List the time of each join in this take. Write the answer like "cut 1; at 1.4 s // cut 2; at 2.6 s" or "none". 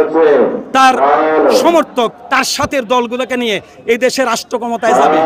none